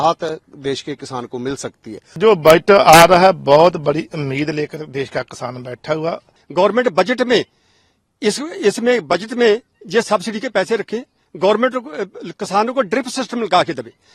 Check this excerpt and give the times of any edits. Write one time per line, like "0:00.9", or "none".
0:02.0
0:06.3